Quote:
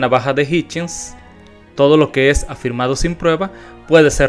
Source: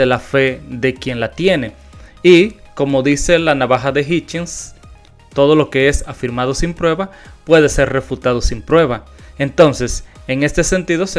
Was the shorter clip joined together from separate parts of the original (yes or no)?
no